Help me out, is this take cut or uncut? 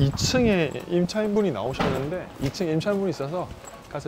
uncut